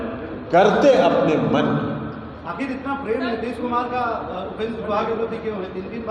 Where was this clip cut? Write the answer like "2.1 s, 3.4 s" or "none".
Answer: none